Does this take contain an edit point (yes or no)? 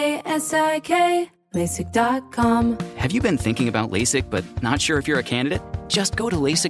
yes